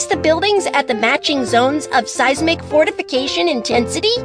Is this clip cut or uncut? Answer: uncut